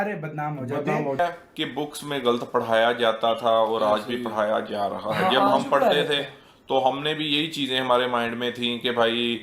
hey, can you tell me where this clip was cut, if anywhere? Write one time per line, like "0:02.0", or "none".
0:01.2